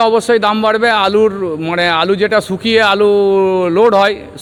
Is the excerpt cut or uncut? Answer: uncut